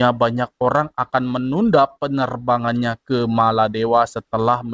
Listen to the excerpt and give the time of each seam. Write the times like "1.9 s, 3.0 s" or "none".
none